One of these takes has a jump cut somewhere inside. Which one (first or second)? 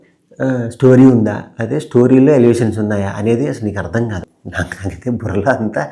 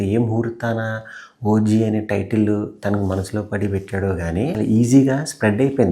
second